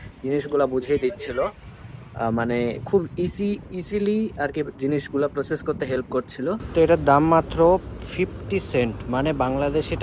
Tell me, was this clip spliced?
yes; 1 cut; at 6.6 s

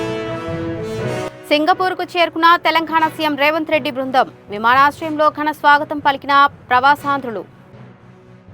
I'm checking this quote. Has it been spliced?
yes; 1 cut; at 1.3 s

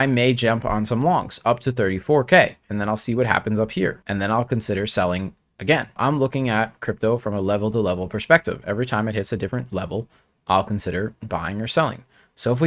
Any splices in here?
no; 0 cuts

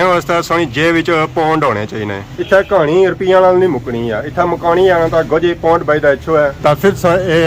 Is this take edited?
no; 0 cuts

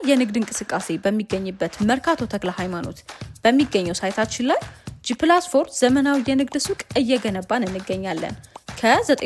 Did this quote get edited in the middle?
no; 0 cuts

